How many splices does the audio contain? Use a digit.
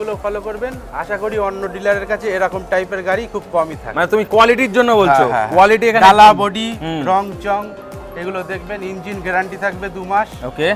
0